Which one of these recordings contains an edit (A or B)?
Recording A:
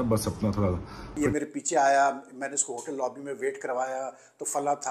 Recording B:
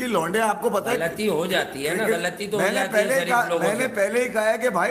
A